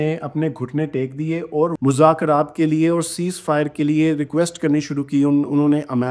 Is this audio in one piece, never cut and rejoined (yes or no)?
no